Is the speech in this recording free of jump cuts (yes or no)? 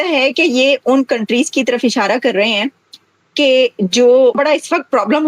no